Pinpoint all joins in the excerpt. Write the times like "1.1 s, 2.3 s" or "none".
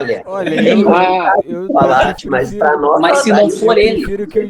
2.1 s